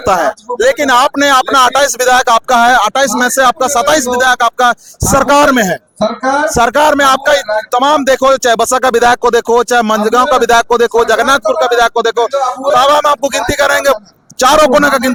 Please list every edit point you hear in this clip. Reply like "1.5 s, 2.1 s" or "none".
none